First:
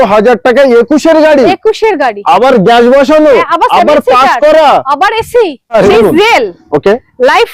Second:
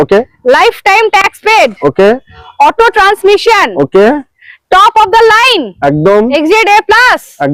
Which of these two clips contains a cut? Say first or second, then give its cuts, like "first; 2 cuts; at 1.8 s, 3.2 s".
first; 1 cut; at 5.8 s